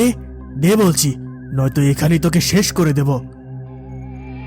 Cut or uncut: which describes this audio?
cut